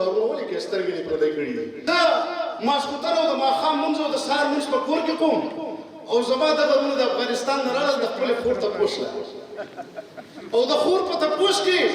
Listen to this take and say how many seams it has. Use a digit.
1